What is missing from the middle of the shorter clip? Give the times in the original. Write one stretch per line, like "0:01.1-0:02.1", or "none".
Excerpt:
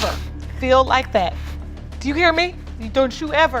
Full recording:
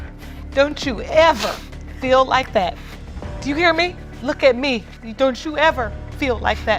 0:04.1-0:04.9